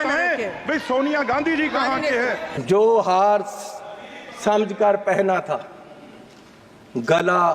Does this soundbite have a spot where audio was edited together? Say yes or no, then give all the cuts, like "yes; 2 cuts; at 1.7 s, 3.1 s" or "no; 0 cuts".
yes; 1 cut; at 2.5 s